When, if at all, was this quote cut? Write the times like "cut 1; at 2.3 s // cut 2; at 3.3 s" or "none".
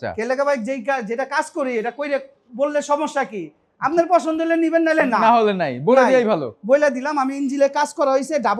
none